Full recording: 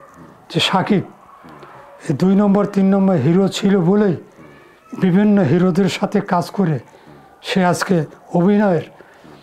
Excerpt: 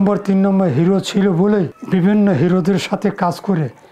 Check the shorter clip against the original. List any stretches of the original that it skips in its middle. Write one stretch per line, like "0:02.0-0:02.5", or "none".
0:04.3-0:04.9